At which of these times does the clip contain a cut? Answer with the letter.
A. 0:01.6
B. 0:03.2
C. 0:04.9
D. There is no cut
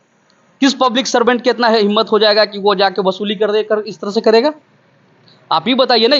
D